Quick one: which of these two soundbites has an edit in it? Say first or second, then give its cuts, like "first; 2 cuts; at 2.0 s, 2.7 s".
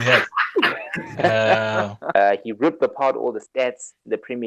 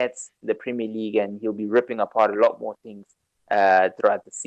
first; 1 cut; at 2.0 s